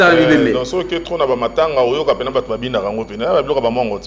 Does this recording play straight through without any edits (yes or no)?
yes